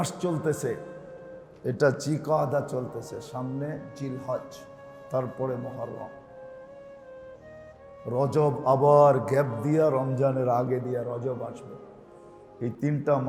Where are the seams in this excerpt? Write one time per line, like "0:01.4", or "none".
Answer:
none